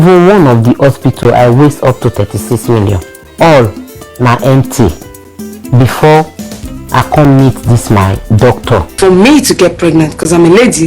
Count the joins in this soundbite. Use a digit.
1